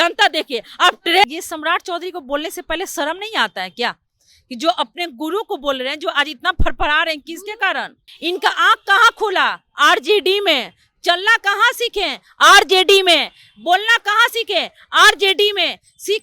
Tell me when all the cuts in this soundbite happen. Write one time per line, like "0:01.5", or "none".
0:01.3
0:08.1